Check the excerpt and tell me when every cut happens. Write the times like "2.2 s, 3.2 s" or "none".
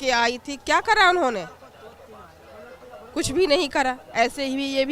none